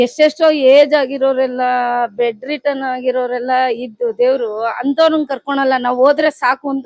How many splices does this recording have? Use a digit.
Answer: 0